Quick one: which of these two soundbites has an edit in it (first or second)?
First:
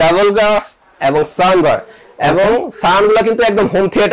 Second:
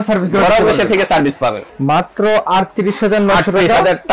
second